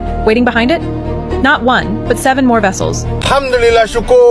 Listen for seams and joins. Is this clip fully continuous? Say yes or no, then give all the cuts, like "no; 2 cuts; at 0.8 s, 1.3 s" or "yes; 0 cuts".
no; 1 cut; at 3.1 s